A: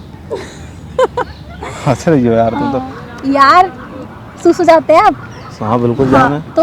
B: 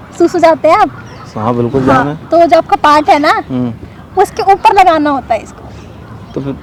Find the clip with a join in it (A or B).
A